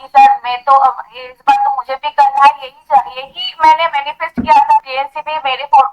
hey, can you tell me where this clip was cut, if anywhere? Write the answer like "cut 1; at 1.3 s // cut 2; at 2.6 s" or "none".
cut 1; at 4.9 s